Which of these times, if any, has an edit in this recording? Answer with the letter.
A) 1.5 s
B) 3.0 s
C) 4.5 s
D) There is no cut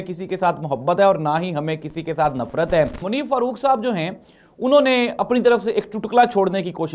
B